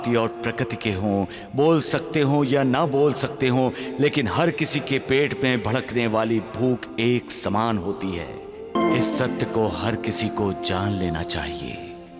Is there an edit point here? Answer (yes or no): yes